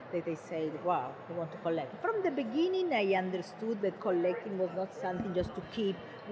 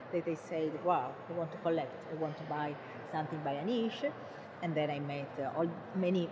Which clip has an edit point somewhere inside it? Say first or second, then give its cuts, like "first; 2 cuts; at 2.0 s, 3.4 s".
first; 2 cuts; at 2.0 s, 4.0 s